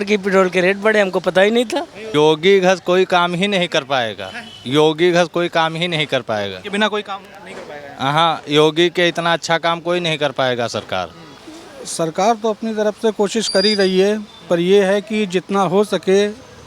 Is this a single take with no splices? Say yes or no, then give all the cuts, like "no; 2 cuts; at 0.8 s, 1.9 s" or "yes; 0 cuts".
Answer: no; 2 cuts; at 2.0 s, 11.2 s